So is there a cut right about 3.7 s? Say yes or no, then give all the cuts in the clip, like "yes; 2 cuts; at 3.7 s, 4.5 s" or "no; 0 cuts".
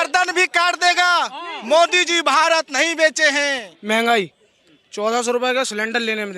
yes; 1 cut; at 3.7 s